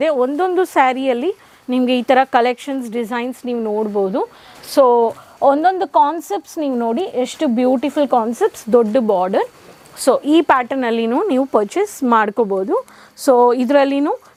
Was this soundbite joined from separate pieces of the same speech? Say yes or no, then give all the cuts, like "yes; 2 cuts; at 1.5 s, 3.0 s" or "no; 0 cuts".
no; 0 cuts